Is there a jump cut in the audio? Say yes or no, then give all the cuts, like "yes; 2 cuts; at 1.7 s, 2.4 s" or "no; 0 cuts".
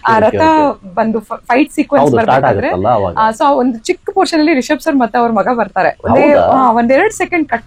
no; 0 cuts